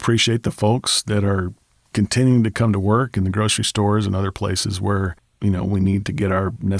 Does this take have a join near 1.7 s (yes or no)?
no